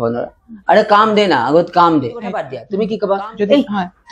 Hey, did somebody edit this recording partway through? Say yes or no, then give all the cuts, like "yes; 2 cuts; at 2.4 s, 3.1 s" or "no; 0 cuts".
yes; 1 cut; at 2.6 s